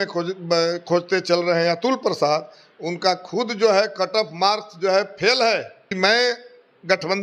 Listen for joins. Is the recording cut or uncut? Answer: cut